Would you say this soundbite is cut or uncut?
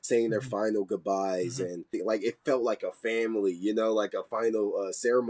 cut